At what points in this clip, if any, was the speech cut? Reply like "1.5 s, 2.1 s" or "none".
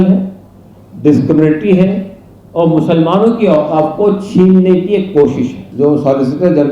5.6 s